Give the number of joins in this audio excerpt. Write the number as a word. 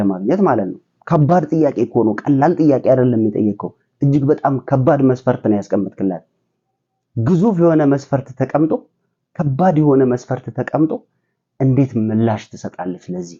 zero